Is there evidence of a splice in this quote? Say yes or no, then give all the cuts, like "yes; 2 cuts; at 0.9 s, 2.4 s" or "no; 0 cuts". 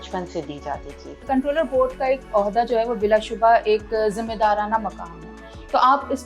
yes; 1 cut; at 1.2 s